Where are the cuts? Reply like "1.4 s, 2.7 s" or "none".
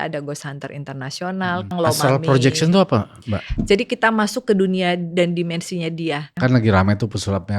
1.7 s, 6.3 s